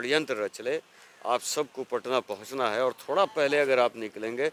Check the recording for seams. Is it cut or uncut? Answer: uncut